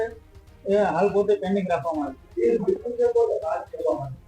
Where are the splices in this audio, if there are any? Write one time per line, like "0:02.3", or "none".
none